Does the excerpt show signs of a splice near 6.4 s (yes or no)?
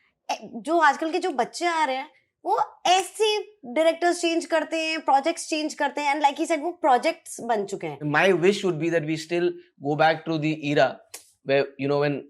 no